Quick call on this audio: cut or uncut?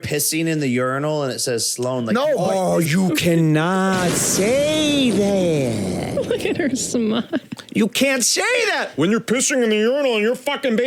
uncut